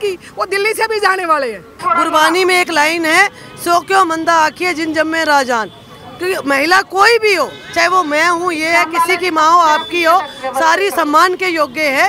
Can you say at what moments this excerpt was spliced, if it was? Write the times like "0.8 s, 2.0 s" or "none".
1.7 s